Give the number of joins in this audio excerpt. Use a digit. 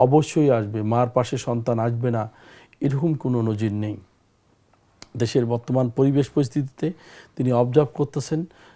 0